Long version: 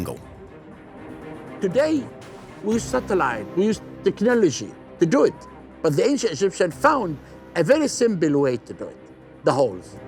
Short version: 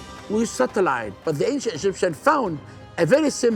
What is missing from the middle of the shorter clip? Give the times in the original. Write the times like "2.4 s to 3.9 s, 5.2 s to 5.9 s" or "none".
3.4 s to 5.7 s